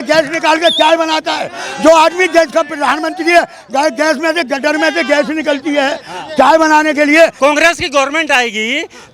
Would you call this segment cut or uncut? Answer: cut